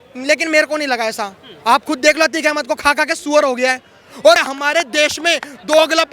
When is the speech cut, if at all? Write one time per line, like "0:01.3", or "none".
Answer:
0:04.4

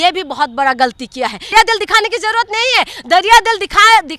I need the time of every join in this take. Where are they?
0:01.5

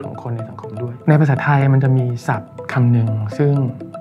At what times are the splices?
0:00.9
0:02.6

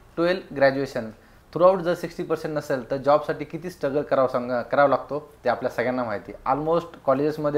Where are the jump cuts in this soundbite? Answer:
none

